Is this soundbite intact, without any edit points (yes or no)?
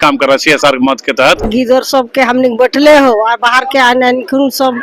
no